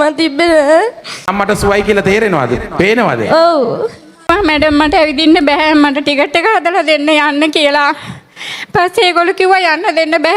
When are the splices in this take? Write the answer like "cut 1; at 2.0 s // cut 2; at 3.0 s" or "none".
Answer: cut 1; at 1.3 s // cut 2; at 4.3 s